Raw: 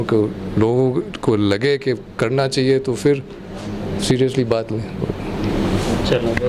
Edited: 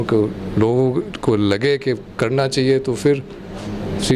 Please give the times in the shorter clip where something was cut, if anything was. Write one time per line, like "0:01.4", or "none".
none